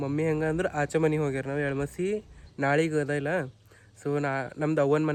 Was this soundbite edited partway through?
no; 0 cuts

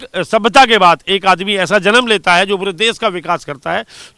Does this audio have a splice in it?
no; 0 cuts

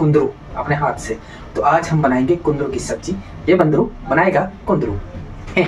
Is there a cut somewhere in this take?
no; 0 cuts

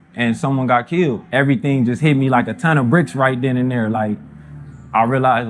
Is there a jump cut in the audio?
yes; 1 cut; at 1.2 s

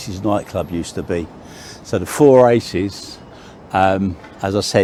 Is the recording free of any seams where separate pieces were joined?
yes; 0 cuts

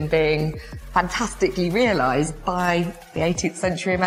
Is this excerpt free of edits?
yes; 0 cuts

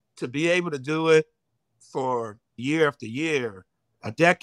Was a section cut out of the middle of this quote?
no; 0 cuts

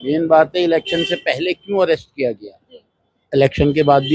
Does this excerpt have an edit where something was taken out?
no; 0 cuts

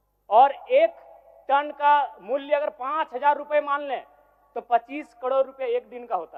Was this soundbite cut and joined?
no; 0 cuts

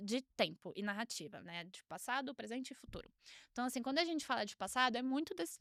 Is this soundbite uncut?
yes; 0 cuts

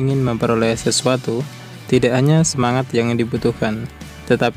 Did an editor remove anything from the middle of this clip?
no; 0 cuts

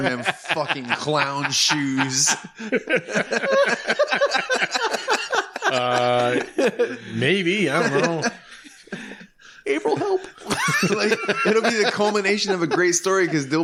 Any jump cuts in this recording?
no; 0 cuts

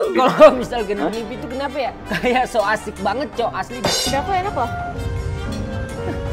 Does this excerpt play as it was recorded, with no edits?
no; 1 cut; at 4.0 s

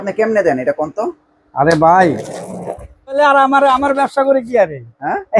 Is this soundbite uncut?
no; 1 cut; at 3.2 s

